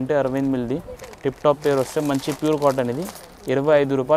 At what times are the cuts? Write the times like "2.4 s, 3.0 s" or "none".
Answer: none